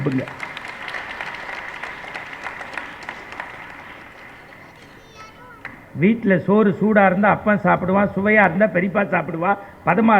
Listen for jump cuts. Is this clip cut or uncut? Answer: uncut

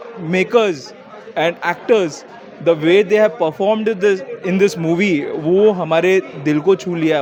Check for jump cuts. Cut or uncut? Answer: uncut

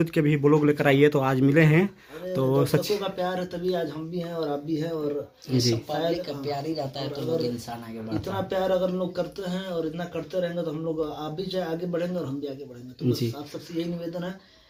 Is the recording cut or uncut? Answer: uncut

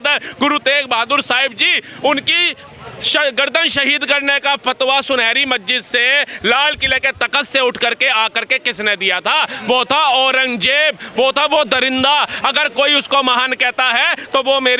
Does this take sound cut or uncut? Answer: uncut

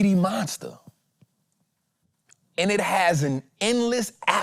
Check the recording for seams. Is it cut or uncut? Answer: cut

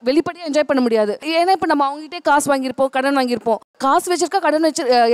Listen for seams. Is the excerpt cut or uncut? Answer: cut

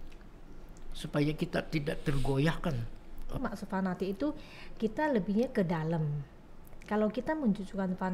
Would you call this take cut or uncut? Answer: cut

